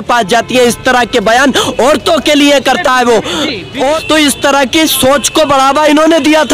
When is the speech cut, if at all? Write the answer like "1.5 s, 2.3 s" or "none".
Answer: 4.0 s